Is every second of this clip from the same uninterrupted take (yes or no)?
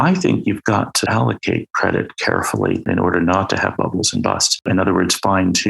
no